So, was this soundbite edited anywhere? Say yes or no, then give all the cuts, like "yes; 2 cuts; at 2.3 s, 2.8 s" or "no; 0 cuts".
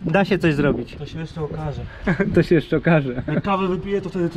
no; 0 cuts